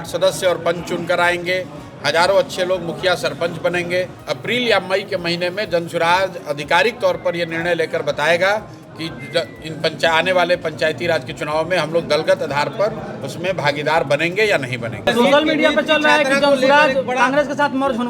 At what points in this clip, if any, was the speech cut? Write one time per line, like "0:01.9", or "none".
0:04.2
0:15.0